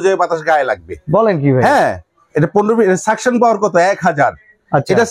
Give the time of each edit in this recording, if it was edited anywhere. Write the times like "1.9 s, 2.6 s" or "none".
none